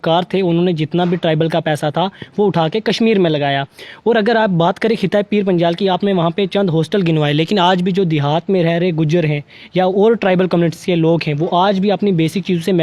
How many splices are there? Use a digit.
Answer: 0